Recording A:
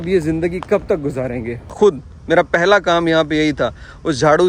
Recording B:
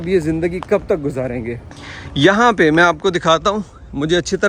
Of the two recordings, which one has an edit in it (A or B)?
A